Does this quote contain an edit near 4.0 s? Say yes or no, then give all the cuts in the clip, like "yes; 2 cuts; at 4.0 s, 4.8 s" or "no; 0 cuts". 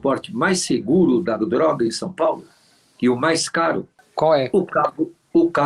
yes; 1 cut; at 4.0 s